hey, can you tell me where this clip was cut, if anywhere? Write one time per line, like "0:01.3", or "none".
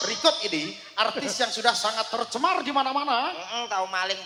none